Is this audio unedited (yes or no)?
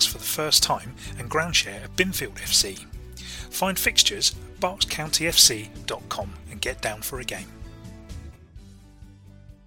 yes